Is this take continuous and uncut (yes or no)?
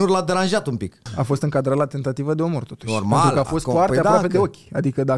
no